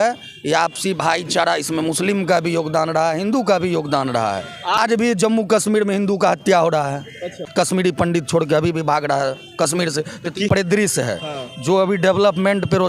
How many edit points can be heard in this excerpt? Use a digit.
3